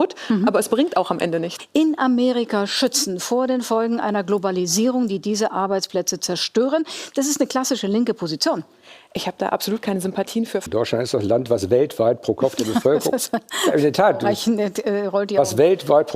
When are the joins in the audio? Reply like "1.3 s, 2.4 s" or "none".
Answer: 1.5 s, 10.6 s